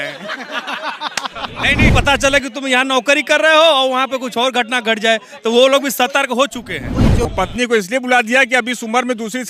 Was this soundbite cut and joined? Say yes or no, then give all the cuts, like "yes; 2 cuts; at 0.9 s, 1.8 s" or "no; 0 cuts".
yes; 2 cuts; at 1.9 s, 7.2 s